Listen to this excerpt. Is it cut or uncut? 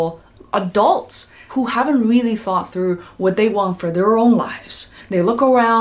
cut